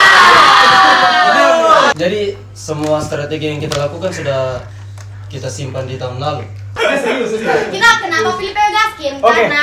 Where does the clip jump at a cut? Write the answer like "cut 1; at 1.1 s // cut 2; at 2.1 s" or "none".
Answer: cut 1; at 2.0 s // cut 2; at 6.7 s